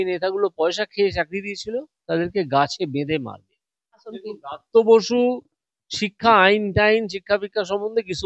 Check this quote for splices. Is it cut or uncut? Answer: cut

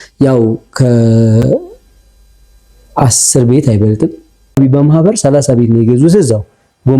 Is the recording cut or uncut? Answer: cut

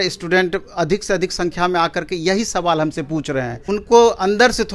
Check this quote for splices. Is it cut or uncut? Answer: cut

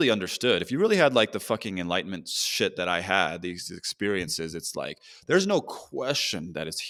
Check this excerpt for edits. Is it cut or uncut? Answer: uncut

